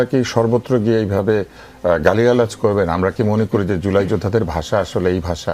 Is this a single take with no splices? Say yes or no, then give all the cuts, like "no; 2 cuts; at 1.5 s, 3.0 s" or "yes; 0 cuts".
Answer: yes; 0 cuts